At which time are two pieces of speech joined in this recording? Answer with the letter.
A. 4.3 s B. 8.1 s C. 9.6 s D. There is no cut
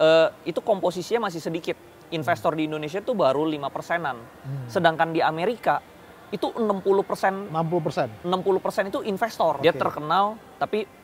C